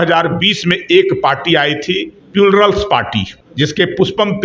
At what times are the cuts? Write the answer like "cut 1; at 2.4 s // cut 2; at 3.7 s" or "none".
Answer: cut 1; at 2.1 s // cut 2; at 3.4 s